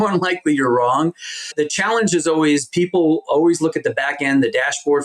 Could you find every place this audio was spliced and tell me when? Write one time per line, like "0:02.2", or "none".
0:01.5